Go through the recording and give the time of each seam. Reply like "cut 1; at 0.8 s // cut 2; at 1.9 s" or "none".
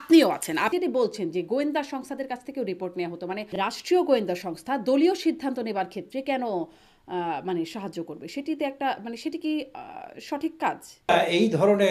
cut 1; at 0.8 s // cut 2; at 3.6 s // cut 3; at 11.1 s